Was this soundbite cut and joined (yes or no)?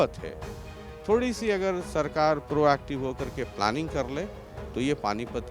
no